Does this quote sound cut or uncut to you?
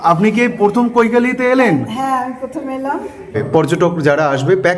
cut